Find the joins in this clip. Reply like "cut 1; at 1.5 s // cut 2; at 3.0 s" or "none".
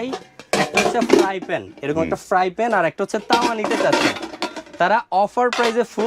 none